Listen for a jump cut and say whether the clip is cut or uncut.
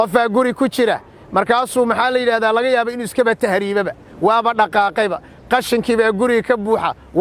uncut